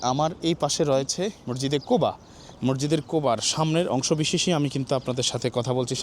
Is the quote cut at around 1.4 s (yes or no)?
yes